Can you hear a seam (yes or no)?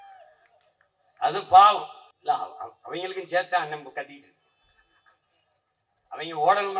yes